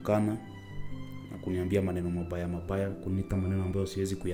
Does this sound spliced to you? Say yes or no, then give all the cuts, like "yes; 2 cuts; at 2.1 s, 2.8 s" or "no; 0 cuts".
no; 0 cuts